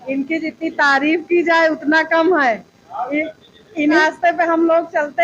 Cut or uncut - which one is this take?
cut